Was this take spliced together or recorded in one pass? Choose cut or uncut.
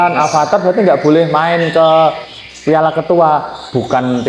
uncut